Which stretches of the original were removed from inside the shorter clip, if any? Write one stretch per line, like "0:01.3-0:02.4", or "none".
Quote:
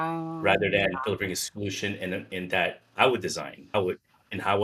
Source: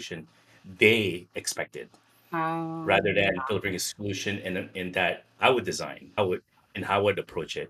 none